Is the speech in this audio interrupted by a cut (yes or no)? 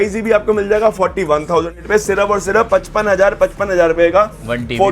yes